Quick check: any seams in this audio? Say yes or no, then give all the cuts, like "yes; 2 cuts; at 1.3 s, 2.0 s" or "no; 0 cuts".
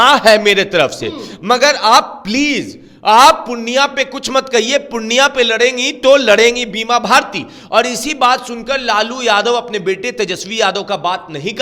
no; 0 cuts